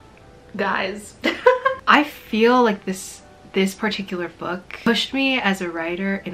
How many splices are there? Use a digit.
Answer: 1